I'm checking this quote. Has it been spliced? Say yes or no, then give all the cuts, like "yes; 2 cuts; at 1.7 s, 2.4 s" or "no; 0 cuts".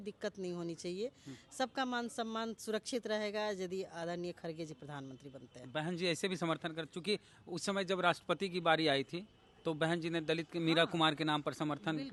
no; 0 cuts